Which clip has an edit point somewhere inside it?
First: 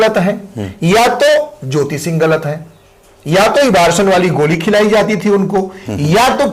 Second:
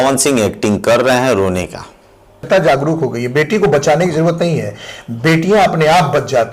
second; 1 cut; at 2.4 s

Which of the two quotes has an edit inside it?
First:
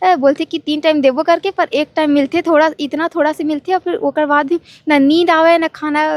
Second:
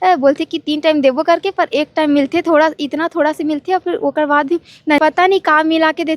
second; 1 cut; at 5.0 s

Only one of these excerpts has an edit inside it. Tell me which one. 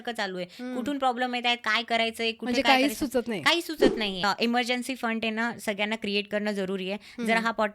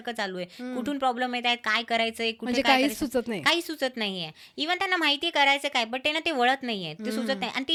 first; 1 cut; at 4.2 s

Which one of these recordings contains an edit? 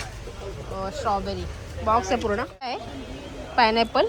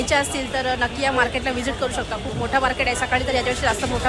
first; 1 cut; at 2.9 s

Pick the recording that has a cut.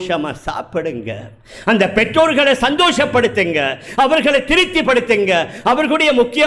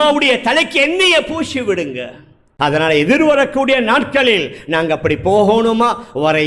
second; 1 cut; at 2.5 s

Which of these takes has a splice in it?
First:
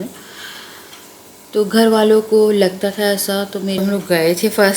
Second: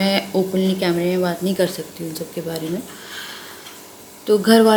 first; 1 cut; at 3.8 s

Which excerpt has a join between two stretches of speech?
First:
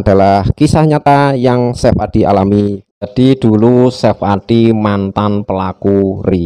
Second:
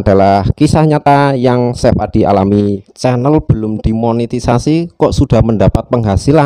first; 1 cut; at 2.9 s

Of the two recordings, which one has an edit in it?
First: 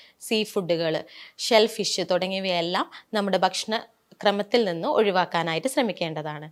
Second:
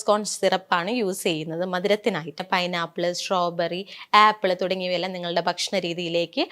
second; 1 cut; at 2.4 s

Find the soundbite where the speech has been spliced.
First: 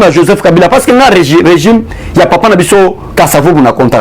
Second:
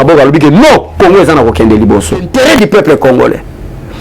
second; 1 cut; at 2.3 s

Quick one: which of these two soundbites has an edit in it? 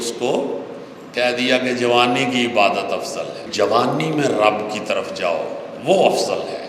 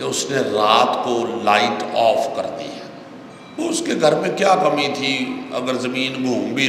first; 1 cut; at 3.4 s

